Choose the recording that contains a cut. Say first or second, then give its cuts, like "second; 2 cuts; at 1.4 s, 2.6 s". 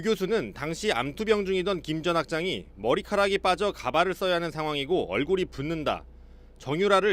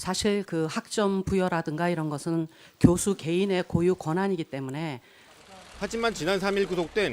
second; 1 cut; at 5.1 s